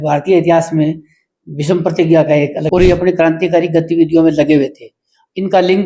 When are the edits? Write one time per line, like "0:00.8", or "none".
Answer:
0:02.6

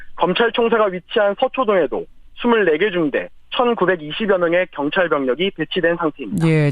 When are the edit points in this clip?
0:01.2

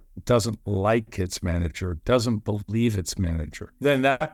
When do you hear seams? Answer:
none

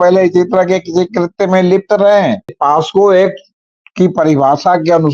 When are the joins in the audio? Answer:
0:02.5

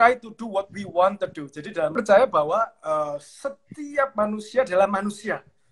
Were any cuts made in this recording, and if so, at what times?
0:01.9

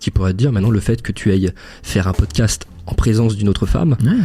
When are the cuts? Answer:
none

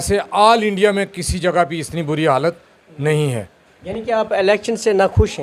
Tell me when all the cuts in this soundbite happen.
none

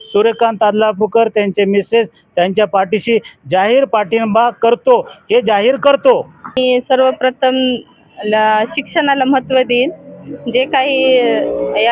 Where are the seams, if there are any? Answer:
0:06.6

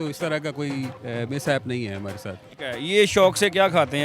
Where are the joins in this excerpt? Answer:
0:01.0
0:02.5

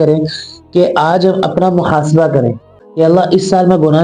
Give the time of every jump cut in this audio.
0:02.8

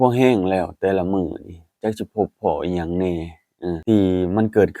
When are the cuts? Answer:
0:03.8

